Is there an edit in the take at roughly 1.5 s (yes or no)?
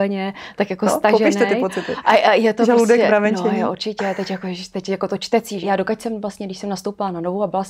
no